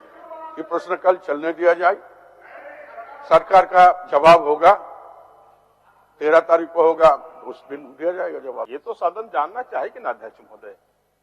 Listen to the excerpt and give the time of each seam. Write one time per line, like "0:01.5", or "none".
0:08.7